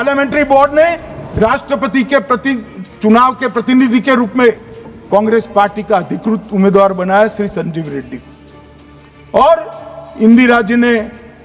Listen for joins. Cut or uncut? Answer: uncut